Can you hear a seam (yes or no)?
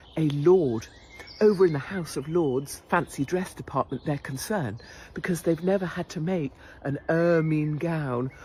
no